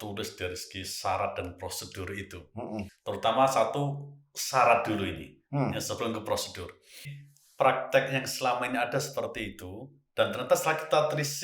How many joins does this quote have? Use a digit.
2